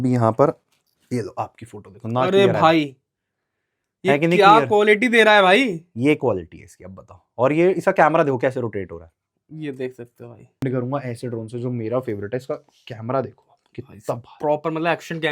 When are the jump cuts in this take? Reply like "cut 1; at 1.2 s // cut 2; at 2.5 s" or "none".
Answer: cut 1; at 10.6 s